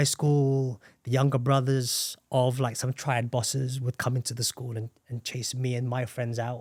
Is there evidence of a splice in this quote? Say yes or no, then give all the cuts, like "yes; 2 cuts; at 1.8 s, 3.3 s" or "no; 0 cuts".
no; 0 cuts